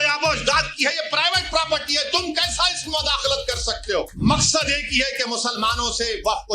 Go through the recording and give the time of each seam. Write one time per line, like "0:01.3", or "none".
0:04.1